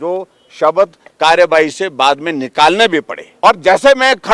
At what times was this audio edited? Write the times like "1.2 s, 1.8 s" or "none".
3.2 s